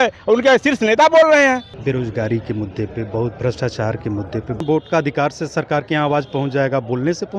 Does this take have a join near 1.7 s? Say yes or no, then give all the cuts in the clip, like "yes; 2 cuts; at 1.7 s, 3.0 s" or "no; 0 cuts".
yes; 2 cuts; at 1.7 s, 4.6 s